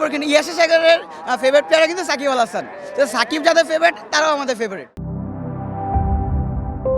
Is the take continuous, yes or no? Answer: yes